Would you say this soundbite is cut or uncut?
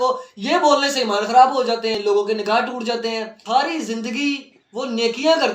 cut